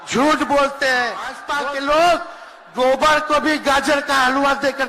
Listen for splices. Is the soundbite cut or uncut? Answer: cut